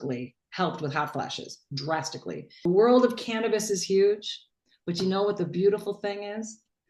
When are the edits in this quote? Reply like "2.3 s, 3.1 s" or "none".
2.5 s